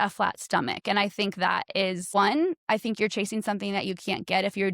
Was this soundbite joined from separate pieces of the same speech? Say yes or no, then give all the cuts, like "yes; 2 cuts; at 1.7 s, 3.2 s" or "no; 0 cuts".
yes; 1 cut; at 2.1 s